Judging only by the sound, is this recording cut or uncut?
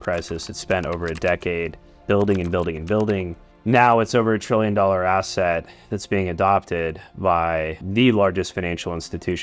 cut